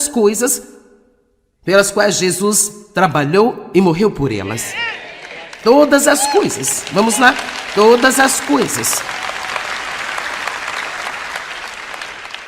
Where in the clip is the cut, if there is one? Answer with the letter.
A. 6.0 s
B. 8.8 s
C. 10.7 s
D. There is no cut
A